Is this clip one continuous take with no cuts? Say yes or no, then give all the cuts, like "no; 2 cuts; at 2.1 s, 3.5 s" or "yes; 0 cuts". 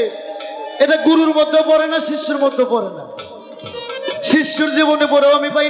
yes; 0 cuts